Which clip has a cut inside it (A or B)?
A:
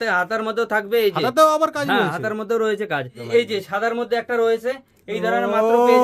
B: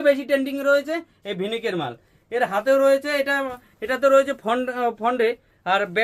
A